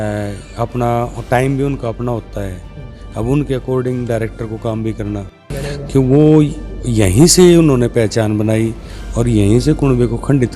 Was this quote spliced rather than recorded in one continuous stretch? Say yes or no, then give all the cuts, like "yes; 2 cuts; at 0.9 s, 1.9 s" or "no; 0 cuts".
yes; 1 cut; at 5.6 s